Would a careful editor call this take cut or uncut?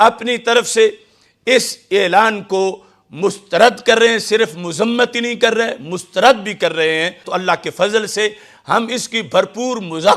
cut